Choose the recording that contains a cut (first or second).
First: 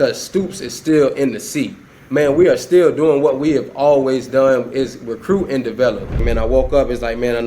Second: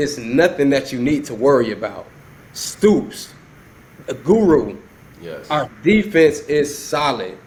first